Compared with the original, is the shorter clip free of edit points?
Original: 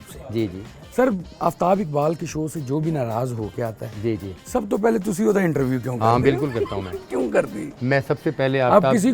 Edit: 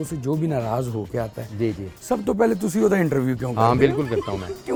yes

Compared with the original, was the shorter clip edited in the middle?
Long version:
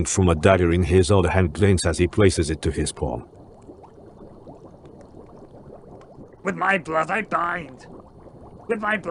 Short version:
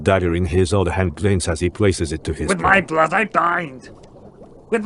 yes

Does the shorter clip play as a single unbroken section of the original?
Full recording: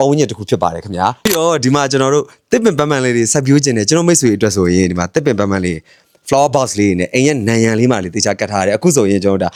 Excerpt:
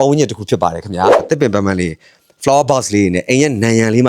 no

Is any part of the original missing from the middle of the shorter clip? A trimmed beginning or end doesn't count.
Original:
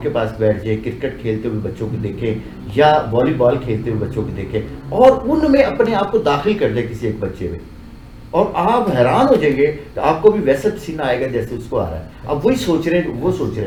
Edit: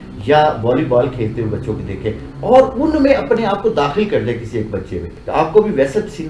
yes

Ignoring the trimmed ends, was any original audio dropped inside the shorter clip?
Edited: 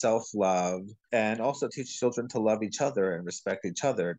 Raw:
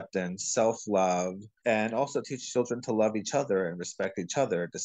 no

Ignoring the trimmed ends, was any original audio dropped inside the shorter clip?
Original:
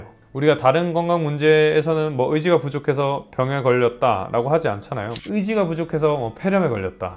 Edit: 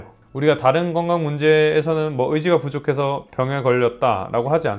no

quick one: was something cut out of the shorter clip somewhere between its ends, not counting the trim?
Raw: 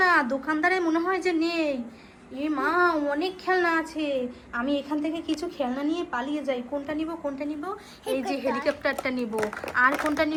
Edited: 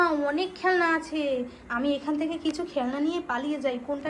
no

